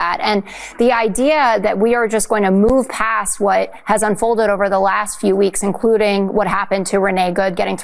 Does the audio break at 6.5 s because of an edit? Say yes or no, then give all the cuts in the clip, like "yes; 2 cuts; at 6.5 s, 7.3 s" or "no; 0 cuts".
no; 0 cuts